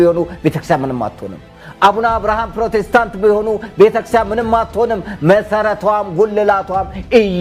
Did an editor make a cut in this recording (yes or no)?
no